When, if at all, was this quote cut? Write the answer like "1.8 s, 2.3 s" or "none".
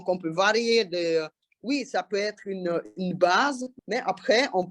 3.7 s

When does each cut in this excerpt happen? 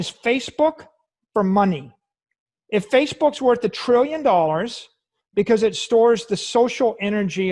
none

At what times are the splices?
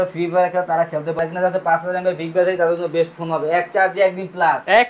1.2 s

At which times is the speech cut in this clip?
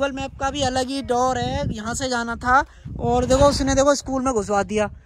none

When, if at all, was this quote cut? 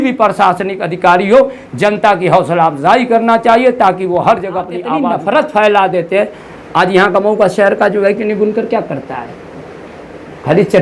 5.0 s

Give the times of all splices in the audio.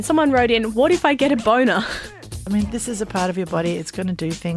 2.1 s

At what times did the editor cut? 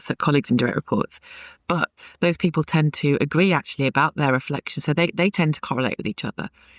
none

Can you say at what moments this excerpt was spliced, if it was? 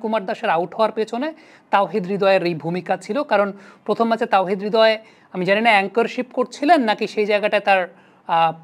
none

